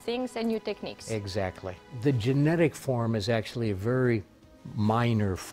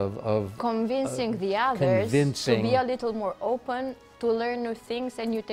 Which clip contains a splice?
first; 1 cut; at 1.9 s

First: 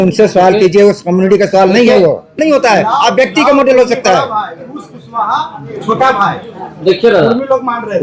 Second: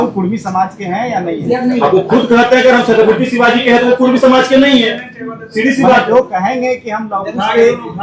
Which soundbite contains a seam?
first; 1 cut; at 2.3 s

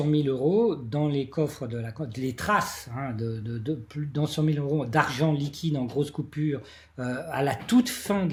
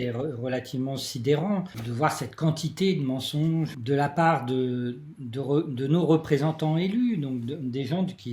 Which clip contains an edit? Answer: second; 2 cuts; at 1.8 s, 3.8 s

